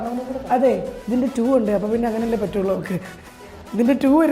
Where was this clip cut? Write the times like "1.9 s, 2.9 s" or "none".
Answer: 0.9 s